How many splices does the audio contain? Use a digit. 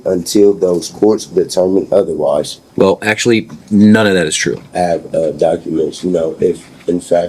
2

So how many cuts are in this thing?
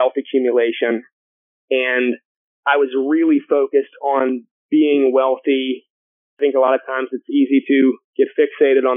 3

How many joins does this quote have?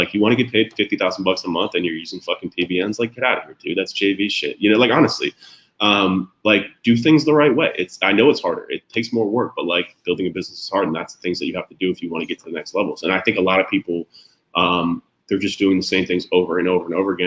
0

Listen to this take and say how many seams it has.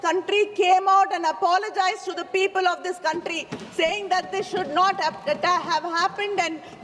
0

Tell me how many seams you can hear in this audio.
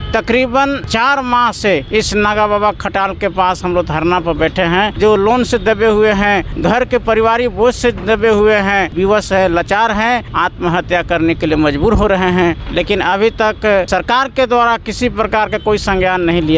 8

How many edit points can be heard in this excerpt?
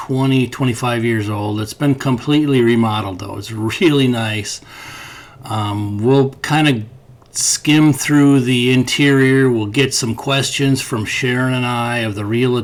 0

